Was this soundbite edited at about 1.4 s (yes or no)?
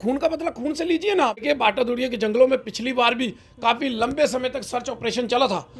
yes